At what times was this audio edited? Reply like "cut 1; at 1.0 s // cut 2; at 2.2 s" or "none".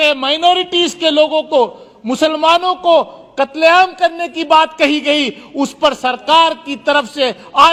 none